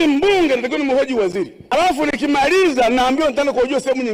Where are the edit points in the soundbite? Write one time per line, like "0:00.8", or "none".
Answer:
0:01.7